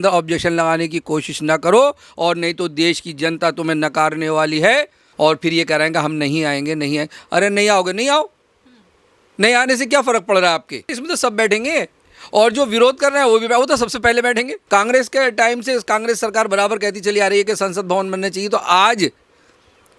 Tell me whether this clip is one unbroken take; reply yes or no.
no